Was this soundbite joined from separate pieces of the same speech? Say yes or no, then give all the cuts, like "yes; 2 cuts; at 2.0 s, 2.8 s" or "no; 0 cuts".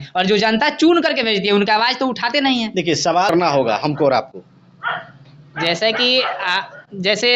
yes; 1 cut; at 3.3 s